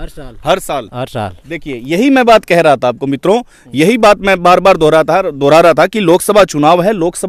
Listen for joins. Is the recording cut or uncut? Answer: uncut